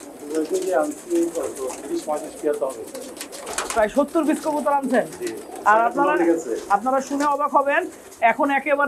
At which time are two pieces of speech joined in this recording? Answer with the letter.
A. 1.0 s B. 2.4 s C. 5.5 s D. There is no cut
C